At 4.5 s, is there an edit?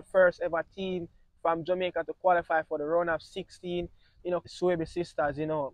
yes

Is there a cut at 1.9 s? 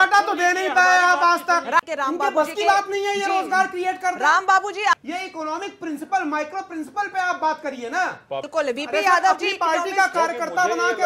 yes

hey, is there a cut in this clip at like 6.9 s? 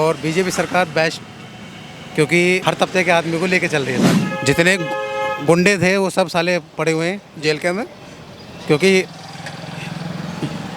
no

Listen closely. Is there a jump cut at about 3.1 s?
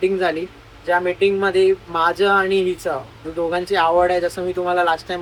no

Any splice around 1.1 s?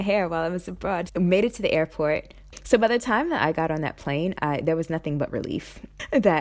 yes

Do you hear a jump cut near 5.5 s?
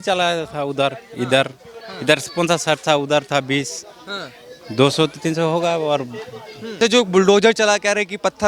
no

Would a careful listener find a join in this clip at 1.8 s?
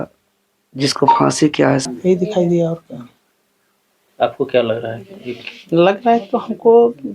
yes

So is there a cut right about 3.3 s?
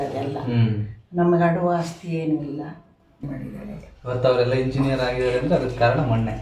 yes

